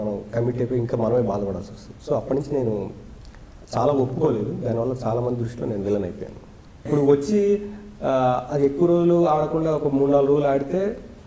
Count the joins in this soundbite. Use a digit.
1